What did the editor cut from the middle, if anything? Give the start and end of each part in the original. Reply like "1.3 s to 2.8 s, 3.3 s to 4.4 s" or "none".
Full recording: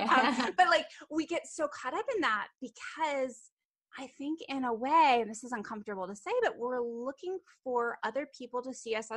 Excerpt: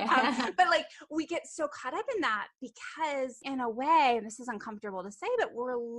3.4 s to 4.4 s